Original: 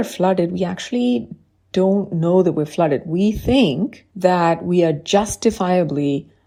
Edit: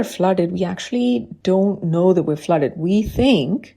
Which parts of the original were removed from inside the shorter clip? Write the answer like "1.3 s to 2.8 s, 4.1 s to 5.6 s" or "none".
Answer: 1.3 s to 1.6 s